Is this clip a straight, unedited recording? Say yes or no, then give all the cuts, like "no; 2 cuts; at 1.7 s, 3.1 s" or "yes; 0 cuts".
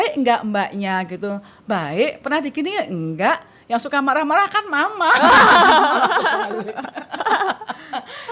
yes; 0 cuts